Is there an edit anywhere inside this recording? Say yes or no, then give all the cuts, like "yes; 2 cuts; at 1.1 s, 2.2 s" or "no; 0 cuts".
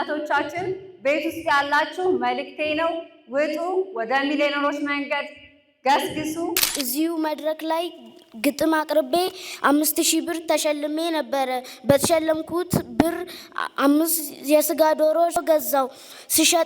yes; 2 cuts; at 6.7 s, 15.4 s